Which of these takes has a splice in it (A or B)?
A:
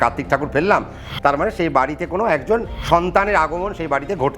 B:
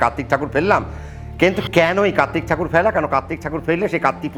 A